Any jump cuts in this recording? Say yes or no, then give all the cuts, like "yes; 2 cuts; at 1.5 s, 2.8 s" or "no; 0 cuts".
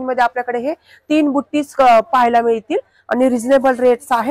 no; 0 cuts